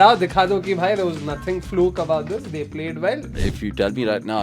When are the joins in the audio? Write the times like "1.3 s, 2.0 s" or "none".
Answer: 3.3 s